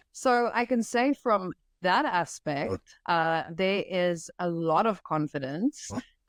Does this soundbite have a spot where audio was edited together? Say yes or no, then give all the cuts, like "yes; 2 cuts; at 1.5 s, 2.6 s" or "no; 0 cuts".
no; 0 cuts